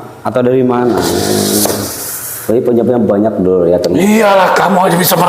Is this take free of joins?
no; 1 cut; at 1.1 s

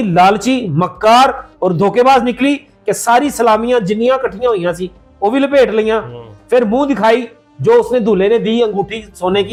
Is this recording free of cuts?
yes; 0 cuts

